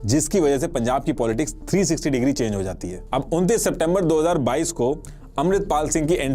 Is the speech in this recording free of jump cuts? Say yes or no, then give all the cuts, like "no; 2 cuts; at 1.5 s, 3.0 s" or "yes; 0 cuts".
no; 1 cut; at 2.9 s